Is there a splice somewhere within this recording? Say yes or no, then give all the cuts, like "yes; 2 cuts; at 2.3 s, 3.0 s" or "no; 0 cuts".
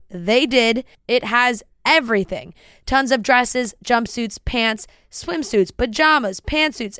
no; 0 cuts